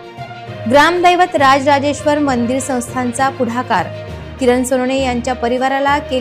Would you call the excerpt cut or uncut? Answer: uncut